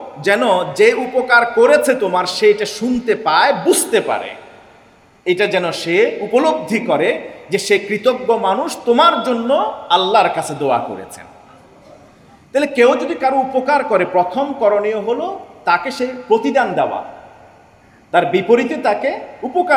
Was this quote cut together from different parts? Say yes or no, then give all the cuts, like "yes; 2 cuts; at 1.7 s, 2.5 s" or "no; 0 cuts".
no; 0 cuts